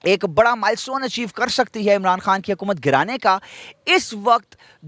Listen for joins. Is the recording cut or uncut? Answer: uncut